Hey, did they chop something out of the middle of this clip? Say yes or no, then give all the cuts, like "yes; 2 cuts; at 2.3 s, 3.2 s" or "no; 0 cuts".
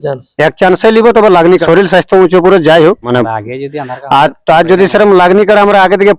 yes; 2 cuts; at 1.6 s, 3.1 s